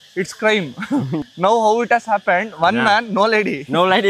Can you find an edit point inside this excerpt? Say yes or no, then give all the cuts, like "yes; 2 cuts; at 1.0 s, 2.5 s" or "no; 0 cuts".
yes; 1 cut; at 1.3 s